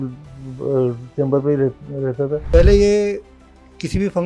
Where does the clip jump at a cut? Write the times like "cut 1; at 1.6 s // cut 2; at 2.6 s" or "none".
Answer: cut 1; at 2.4 s